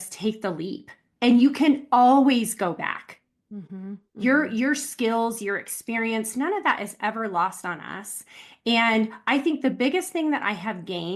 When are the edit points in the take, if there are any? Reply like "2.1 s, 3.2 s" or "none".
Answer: none